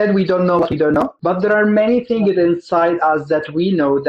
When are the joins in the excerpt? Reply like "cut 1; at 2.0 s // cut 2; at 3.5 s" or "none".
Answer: cut 1; at 1.2 s